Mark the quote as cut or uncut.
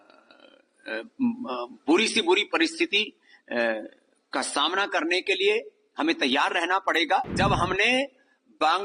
cut